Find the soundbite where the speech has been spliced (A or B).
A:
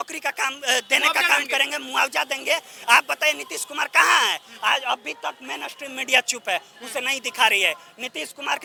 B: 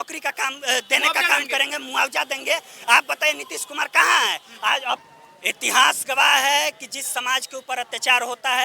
B